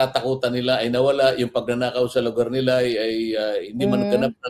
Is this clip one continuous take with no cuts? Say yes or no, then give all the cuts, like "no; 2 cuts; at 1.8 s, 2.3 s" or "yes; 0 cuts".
yes; 0 cuts